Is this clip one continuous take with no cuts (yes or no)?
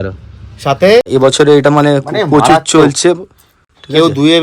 no